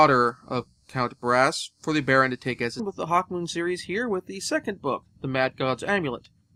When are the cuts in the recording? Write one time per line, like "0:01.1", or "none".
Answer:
none